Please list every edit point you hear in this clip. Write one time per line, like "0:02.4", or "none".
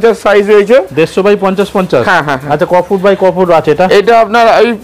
none